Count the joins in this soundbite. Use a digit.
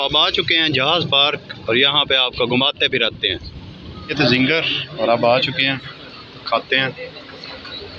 1